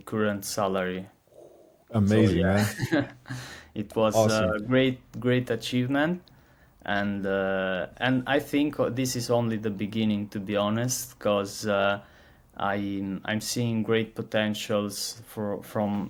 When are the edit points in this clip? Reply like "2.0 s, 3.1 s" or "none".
none

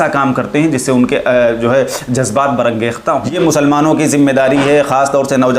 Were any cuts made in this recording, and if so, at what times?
3.3 s

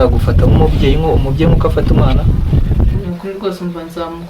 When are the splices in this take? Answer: 3.0 s

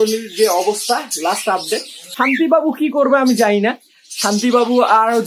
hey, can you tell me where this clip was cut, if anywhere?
2.0 s

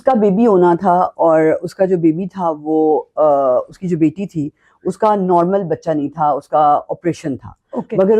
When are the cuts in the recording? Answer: none

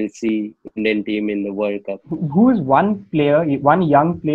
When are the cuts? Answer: 2.0 s

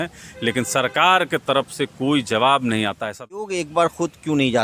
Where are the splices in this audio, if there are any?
3.6 s

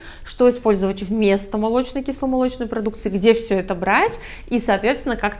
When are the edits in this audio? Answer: none

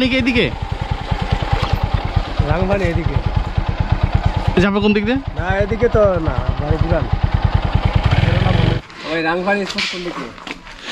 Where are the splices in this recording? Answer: 8.8 s

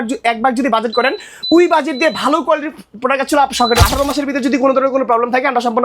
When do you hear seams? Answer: 3.8 s

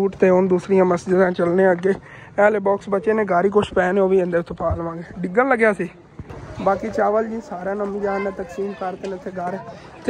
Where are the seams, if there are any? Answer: none

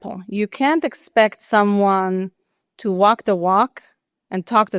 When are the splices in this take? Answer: none

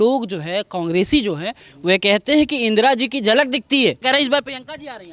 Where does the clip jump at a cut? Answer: 4.0 s

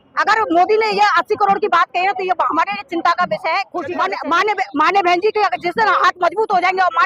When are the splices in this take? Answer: 4.1 s

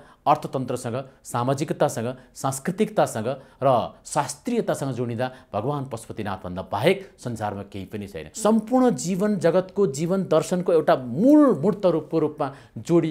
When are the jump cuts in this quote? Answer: 8.3 s

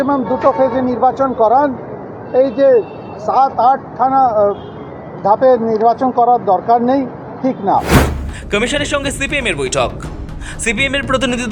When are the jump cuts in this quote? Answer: none

